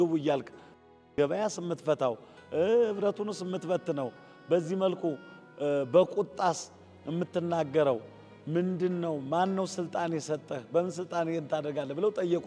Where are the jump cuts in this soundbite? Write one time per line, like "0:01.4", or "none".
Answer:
none